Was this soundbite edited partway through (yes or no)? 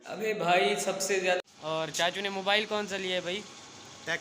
yes